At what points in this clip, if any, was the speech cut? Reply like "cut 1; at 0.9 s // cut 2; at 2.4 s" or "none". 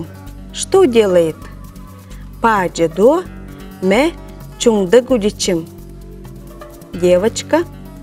none